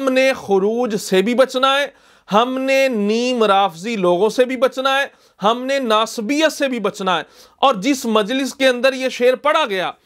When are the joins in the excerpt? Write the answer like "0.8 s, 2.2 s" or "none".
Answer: none